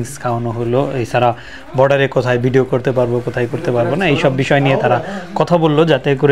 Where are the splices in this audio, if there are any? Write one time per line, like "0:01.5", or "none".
none